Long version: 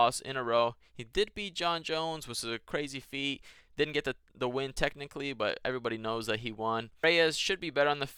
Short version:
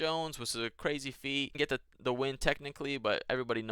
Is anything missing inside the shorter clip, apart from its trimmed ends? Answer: yes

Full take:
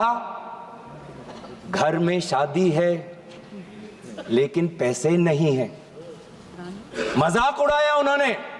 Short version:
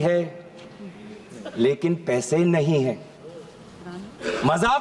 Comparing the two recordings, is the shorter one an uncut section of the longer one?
yes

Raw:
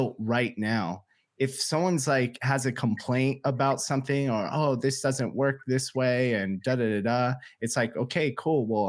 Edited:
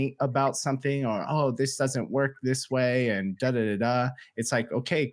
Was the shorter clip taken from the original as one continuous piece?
yes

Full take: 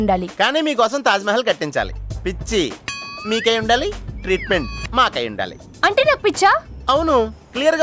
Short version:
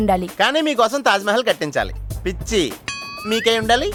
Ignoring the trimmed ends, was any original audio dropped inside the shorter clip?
no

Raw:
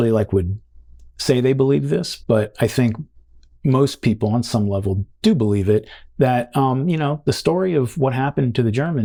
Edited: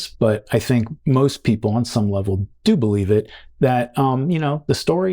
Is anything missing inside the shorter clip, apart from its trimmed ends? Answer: yes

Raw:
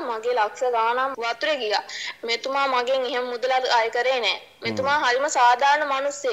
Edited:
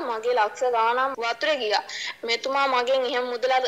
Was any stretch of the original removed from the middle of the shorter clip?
no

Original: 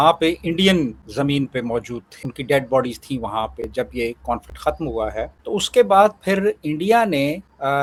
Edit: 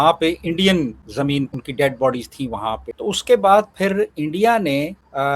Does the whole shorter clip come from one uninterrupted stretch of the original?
no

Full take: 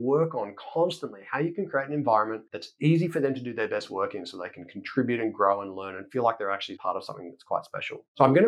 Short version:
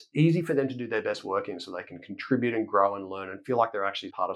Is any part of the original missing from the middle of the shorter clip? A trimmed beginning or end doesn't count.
no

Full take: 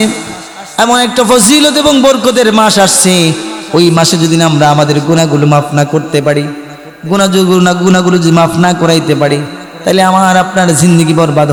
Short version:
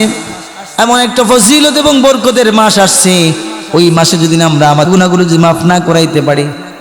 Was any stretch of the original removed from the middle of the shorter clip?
yes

